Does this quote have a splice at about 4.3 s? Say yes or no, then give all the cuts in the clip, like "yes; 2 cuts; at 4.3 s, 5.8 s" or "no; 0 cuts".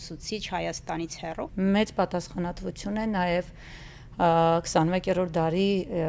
no; 1 cut; at 1.5 s